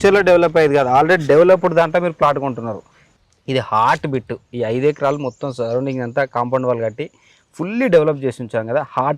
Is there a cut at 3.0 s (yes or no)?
yes